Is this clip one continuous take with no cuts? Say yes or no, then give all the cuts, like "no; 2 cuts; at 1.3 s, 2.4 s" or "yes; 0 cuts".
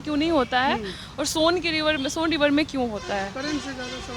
yes; 0 cuts